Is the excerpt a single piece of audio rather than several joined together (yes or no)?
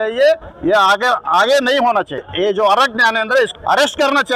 no